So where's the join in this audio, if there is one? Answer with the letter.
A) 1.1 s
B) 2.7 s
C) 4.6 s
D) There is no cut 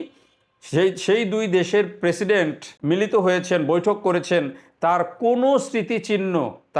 B